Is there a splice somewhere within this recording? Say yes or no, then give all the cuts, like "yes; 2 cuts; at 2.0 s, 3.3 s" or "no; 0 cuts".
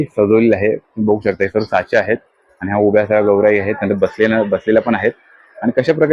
no; 0 cuts